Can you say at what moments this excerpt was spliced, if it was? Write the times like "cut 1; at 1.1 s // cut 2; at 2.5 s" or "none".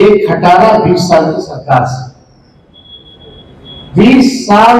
none